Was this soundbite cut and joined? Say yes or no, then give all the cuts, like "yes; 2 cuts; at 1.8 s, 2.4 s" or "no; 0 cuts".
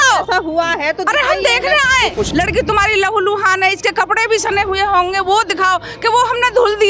yes; 1 cut; at 2.3 s